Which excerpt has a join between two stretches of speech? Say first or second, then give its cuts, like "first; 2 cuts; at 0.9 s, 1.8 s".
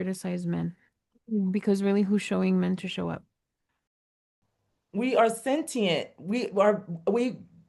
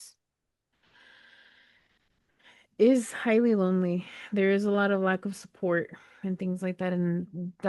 first; 1 cut; at 4.3 s